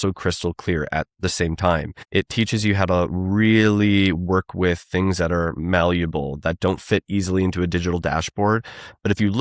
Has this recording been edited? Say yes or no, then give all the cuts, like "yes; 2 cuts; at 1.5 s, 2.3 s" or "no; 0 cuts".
yes; 1 cut; at 2.0 s